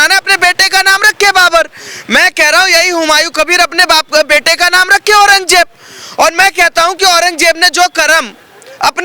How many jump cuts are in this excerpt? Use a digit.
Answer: 0